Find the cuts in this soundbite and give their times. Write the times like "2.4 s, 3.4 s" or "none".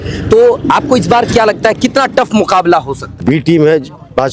3.2 s